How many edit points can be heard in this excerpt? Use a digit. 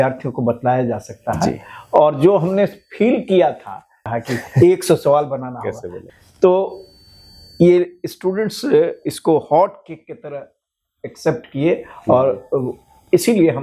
2